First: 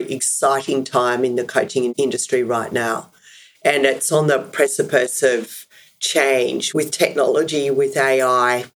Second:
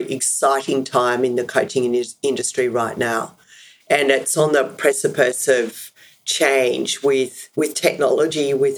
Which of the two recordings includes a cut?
first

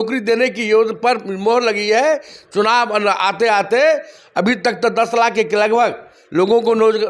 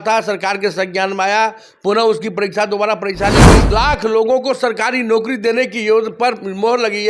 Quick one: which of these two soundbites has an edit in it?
second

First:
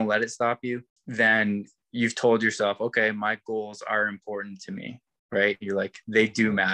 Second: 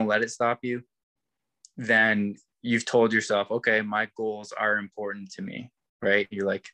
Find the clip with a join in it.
first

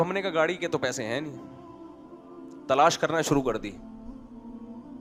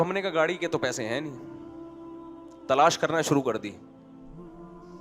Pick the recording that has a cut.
second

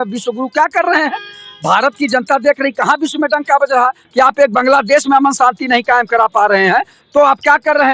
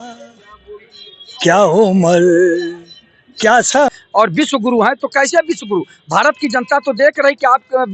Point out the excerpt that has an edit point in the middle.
second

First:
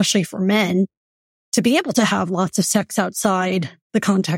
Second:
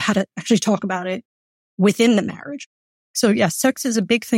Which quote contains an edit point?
second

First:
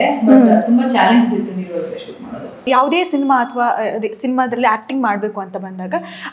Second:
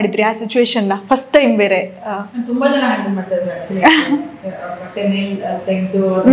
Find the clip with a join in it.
first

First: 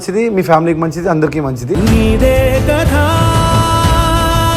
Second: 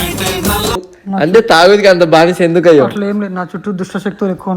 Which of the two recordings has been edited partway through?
second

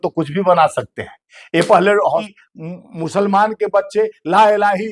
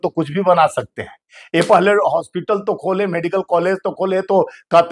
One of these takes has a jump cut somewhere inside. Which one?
first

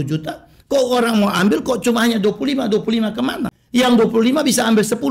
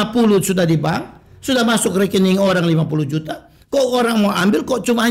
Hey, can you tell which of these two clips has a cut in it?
first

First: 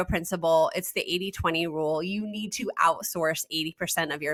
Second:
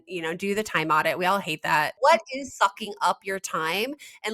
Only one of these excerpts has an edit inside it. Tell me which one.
second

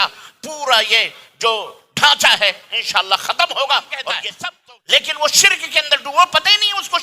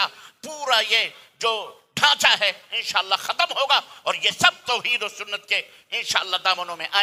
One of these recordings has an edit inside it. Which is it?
first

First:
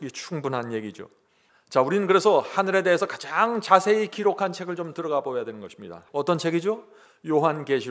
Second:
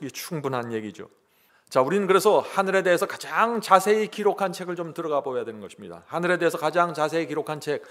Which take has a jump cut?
first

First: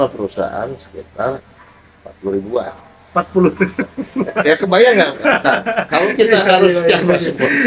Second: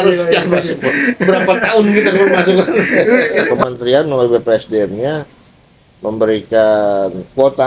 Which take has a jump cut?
second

